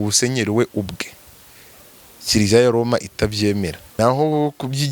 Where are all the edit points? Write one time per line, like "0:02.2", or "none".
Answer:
0:04.0